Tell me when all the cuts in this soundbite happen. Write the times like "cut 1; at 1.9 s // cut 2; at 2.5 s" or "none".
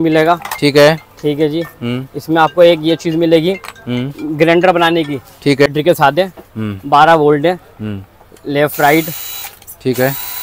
cut 1; at 5.7 s